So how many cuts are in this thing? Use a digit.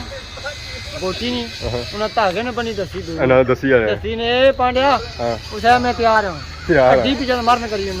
0